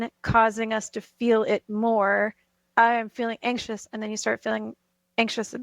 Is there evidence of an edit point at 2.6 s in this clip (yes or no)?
yes